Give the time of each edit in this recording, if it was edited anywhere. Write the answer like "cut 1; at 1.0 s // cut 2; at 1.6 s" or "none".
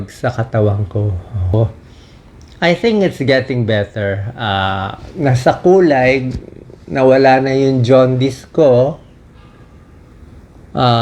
cut 1; at 1.5 s